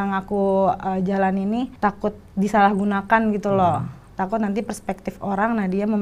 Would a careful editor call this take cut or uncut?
cut